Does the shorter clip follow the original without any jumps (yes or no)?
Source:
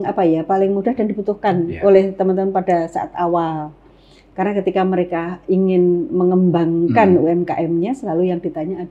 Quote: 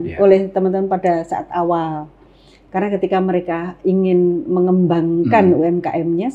yes